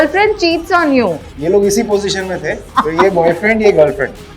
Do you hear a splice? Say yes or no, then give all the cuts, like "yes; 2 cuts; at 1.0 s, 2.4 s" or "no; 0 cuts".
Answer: yes; 2 cuts; at 1.2 s, 2.7 s